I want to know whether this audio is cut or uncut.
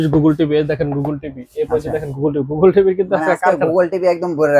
uncut